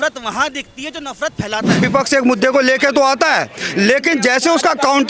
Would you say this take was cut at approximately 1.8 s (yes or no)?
yes